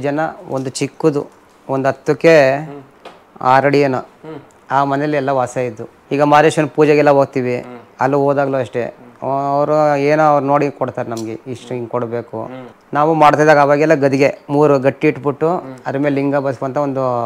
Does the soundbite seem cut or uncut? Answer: cut